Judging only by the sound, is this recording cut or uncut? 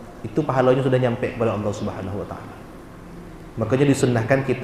uncut